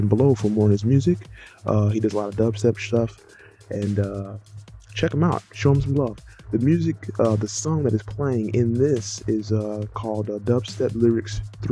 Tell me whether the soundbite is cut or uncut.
uncut